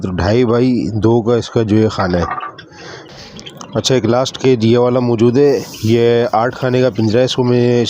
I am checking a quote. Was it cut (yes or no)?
yes